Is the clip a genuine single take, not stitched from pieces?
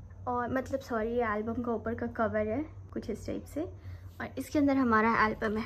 yes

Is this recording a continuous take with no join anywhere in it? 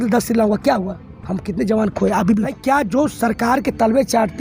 no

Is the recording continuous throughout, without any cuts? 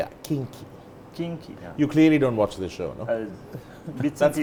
yes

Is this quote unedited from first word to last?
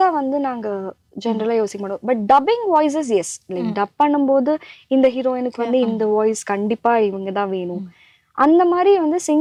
yes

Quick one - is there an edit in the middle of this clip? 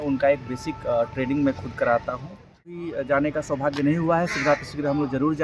yes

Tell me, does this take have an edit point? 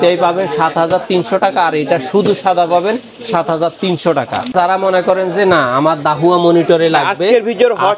yes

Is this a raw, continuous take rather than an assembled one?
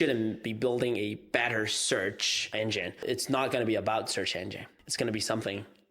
no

